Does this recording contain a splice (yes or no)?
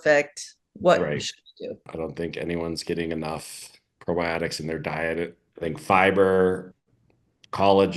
yes